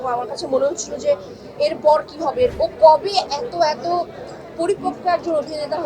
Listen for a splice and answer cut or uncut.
cut